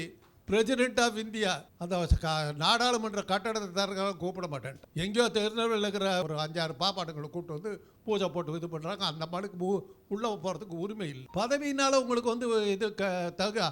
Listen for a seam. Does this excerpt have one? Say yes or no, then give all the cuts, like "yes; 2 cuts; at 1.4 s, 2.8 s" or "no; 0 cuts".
yes; 4 cuts; at 1.7 s, 4.8 s, 6.2 s, 11.2 s